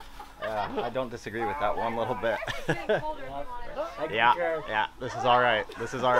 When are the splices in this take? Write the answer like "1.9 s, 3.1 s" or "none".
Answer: 3.8 s